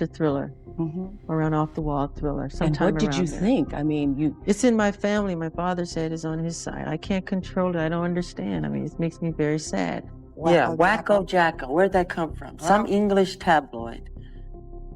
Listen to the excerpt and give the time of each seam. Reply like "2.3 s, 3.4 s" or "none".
10.0 s

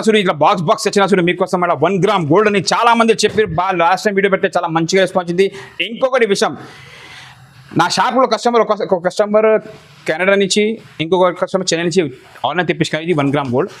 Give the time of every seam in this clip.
none

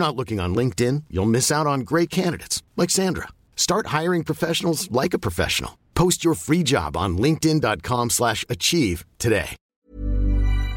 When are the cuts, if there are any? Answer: 9.6 s

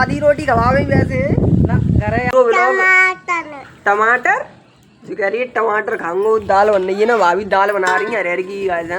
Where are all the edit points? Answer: 2.3 s, 8.1 s

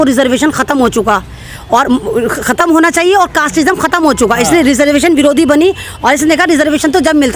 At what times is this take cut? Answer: none

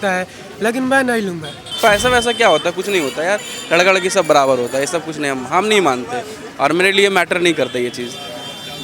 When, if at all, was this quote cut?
1.8 s

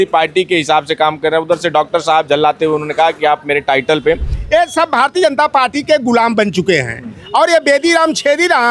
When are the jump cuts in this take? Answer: 4.3 s

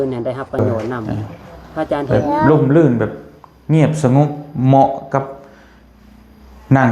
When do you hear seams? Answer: 2.4 s

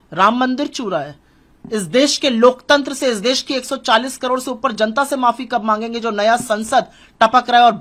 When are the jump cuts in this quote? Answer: none

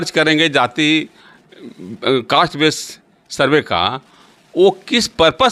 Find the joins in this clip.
none

